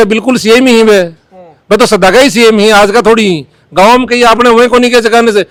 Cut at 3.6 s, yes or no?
no